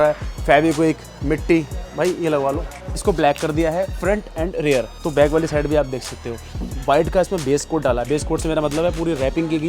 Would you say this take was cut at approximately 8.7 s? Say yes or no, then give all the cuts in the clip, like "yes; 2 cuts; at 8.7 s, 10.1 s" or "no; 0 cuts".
no; 3 cuts; at 3.0 s, 5.0 s, 6.6 s